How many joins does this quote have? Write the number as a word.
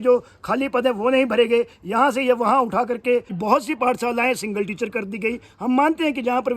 one